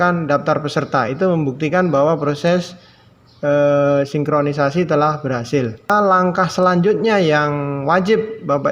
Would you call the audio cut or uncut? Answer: cut